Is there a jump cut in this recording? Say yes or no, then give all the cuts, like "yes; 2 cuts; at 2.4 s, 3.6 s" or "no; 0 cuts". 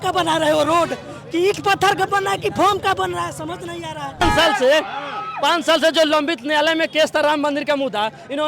yes; 1 cut; at 4.2 s